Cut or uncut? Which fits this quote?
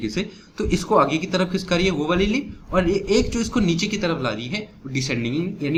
uncut